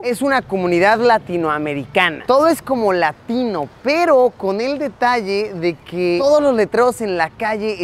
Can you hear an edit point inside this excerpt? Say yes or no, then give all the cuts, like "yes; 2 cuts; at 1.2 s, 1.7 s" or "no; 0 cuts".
yes; 1 cut; at 2.2 s